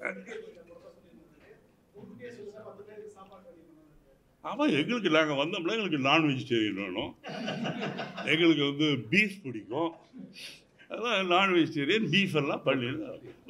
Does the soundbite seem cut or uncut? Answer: uncut